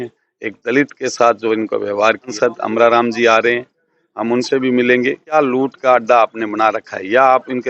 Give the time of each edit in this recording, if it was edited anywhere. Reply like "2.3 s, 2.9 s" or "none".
2.3 s, 5.3 s